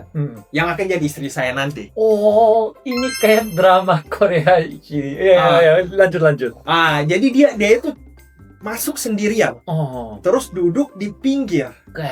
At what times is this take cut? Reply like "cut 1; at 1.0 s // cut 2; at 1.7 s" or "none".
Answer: none